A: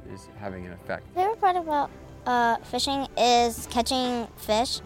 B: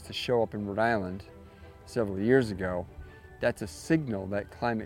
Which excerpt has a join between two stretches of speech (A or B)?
A